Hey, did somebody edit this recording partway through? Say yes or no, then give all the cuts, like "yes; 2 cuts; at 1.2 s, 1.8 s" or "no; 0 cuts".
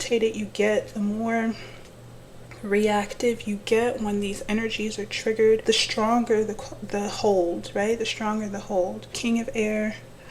yes; 2 cuts; at 5.6 s, 9.2 s